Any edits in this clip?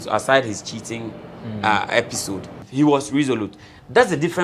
yes; 1 cut; at 2.5 s

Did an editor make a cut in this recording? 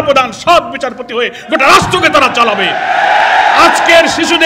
no; 0 cuts

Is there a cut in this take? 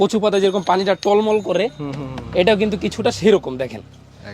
no; 0 cuts

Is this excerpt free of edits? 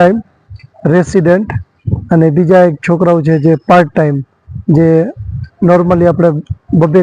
yes; 0 cuts

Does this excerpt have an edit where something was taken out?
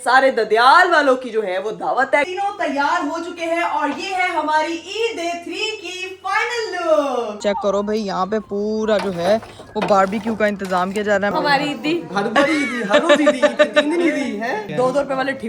yes; 4 cuts; at 2.3 s, 7.4 s, 11.3 s, 14.7 s

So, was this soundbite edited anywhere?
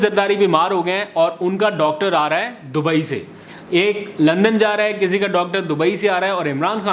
no; 0 cuts

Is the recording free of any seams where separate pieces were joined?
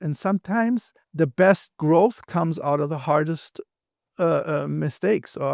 no; 1 cut; at 1.0 s

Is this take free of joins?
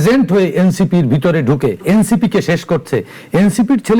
no; 1 cut; at 1.8 s

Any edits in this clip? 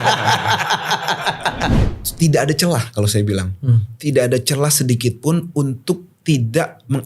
yes; 1 cut; at 1.7 s

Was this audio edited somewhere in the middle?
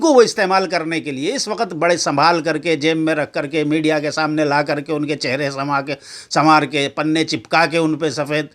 no; 0 cuts

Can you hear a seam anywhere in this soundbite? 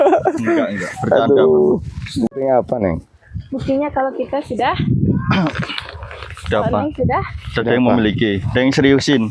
yes; 1 cut; at 2.2 s

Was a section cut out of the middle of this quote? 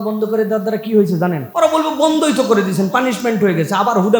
yes; 1 cut; at 1.4 s

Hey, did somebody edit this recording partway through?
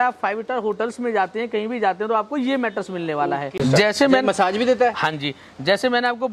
yes; 1 cut; at 3.5 s

